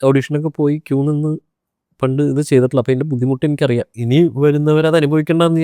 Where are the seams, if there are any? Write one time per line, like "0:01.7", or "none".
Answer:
0:04.0